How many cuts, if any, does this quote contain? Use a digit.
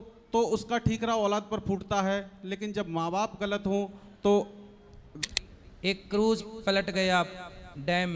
1